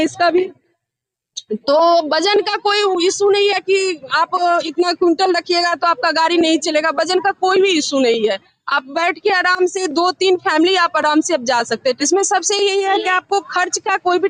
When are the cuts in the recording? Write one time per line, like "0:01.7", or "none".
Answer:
0:12.0